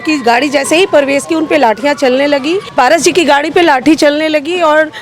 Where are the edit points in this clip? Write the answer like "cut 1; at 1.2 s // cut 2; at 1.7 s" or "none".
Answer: cut 1; at 2.6 s

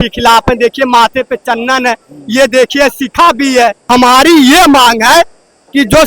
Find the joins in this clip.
cut 1; at 3.8 s

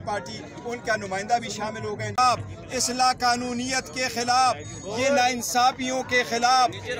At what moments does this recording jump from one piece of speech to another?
cut 1; at 2.2 s

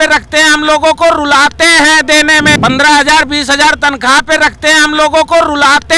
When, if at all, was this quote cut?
cut 1; at 2.6 s

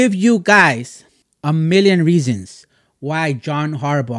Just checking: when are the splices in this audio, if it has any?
none

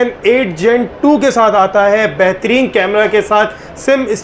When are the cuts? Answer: none

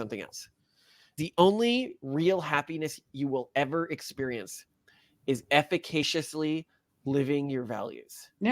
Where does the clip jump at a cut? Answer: cut 1; at 1.2 s

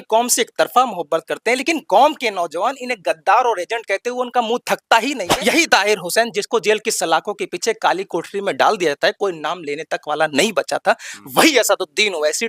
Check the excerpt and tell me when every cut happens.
cut 1; at 5.3 s

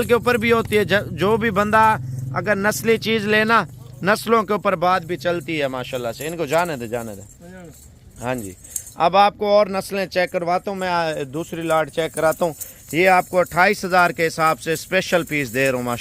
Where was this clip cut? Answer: none

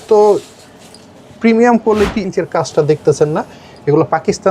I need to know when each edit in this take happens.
cut 1; at 2.3 s

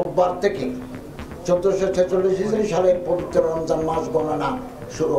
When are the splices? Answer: none

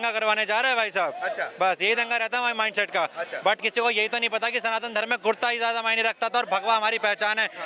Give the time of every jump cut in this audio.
none

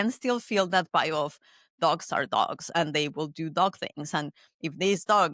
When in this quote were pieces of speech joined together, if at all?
none

